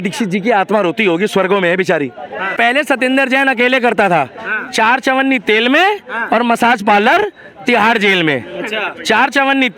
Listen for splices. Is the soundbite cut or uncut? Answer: cut